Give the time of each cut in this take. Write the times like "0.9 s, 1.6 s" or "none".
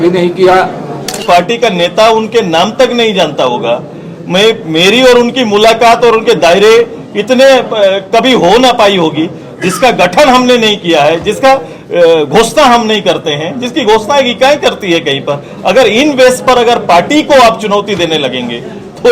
1.2 s